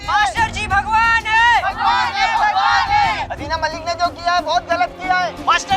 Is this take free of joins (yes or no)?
yes